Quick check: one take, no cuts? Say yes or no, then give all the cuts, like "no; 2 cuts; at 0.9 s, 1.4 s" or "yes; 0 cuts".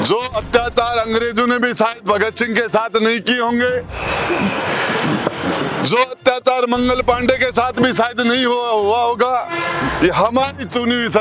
yes; 0 cuts